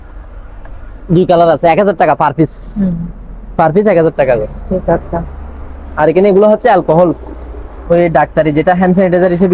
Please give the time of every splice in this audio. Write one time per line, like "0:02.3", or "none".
none